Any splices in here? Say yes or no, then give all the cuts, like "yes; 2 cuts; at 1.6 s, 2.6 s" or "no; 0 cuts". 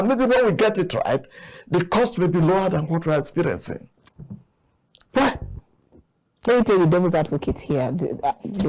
yes; 1 cut; at 4.0 s